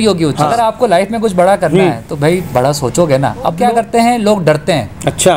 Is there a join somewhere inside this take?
yes; 2 cuts; at 0.8 s, 3.7 s

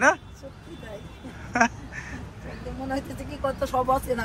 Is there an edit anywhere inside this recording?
no; 0 cuts

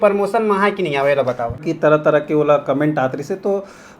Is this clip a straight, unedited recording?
no; 1 cut; at 1.6 s

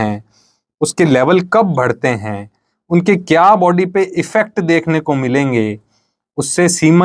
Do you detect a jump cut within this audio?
no; 0 cuts

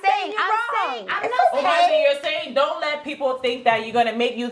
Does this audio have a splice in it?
yes; 1 cut; at 1.1 s

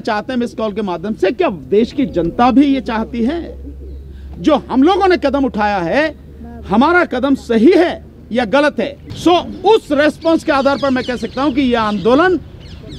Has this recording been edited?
yes; 1 cut; at 9.0 s

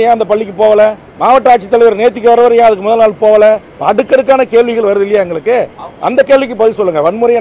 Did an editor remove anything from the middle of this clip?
yes; 2 cuts; at 1.1 s, 3.7 s

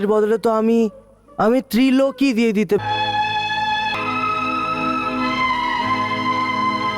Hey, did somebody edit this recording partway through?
yes; 2 cuts; at 2.8 s, 4.0 s

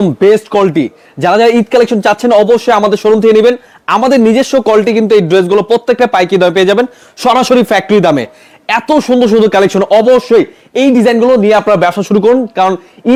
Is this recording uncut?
yes; 0 cuts

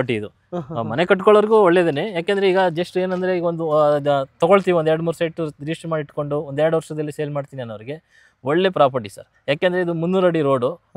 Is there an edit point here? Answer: no; 0 cuts

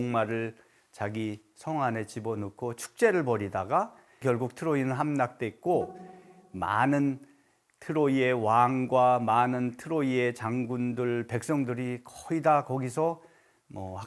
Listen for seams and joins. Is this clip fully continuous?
no; 1 cut; at 4.2 s

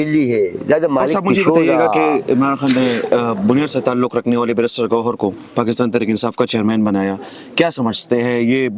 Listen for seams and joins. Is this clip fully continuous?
no; 1 cut; at 1.8 s

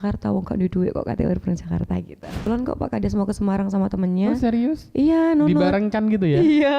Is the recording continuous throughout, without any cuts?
no; 1 cut; at 2.5 s

